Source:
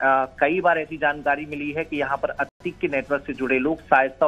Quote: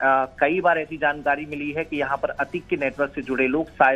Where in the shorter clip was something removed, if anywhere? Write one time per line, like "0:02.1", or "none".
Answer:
0:02.5

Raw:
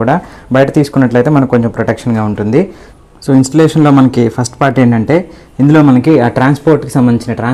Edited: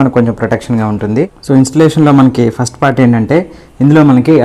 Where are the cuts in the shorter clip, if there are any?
0:01.4

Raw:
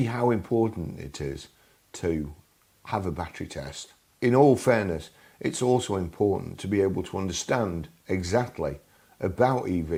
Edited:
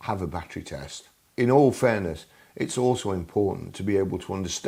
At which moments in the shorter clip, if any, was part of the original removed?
none

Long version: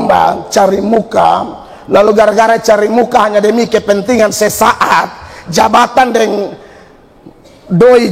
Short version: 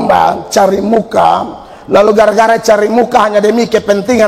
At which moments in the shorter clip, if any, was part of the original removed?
none

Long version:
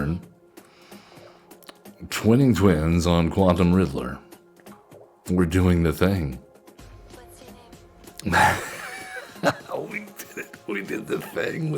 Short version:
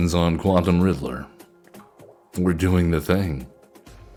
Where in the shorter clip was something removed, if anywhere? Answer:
none

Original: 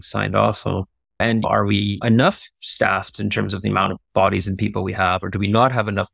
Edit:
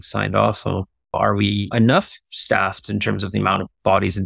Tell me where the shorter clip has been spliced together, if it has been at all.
0:01.1

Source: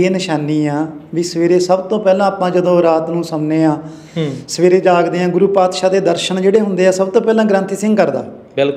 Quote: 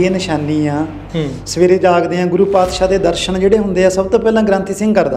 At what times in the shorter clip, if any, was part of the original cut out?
0:01.0

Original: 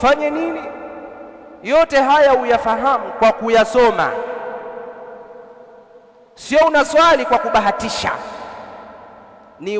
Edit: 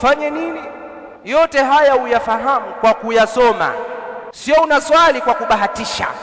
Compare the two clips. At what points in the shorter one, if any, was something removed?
0:01.3
0:04.3

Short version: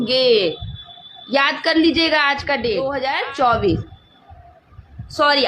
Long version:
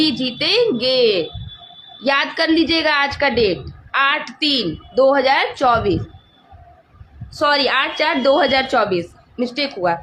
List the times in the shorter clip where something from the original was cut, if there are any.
0:02.9

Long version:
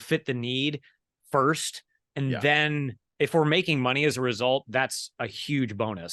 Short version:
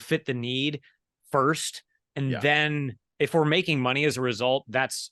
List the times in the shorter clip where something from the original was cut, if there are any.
none

